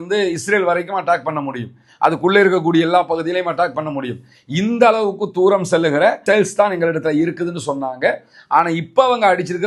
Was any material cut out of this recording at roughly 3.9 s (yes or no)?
no